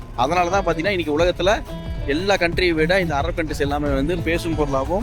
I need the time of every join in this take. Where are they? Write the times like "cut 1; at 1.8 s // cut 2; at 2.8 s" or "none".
none